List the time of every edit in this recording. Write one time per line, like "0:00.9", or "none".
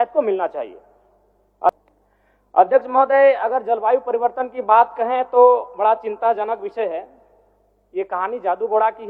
0:01.7

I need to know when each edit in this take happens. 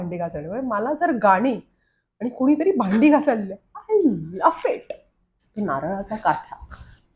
0:05.4

